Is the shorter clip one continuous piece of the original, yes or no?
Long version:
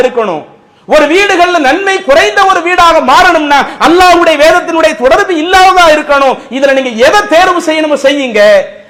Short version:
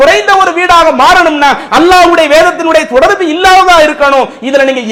yes